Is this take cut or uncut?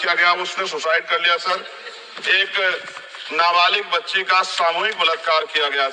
cut